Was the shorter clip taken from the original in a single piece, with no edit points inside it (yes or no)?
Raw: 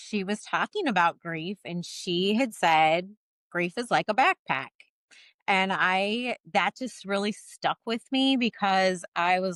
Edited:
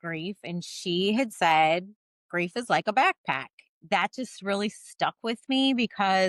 no